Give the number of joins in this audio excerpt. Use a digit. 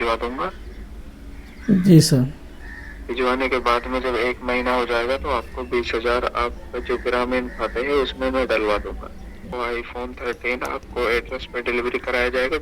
1